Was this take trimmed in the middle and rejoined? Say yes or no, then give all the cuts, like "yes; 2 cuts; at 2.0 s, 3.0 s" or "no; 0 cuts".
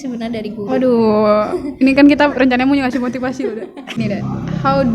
yes; 1 cut; at 4.0 s